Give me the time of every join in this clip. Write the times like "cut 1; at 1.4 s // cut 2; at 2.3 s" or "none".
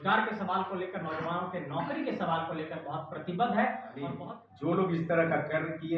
cut 1; at 4.1 s